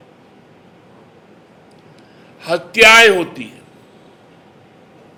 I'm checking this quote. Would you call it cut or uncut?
uncut